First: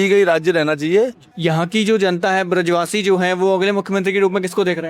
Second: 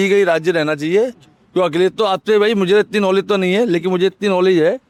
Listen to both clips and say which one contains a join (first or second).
first